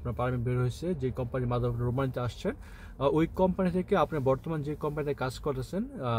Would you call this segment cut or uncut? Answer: uncut